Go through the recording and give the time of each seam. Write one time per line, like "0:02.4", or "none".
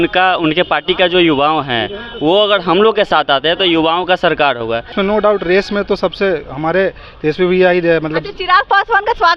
0:04.9